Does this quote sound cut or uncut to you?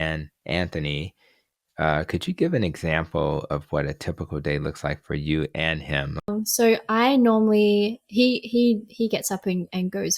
cut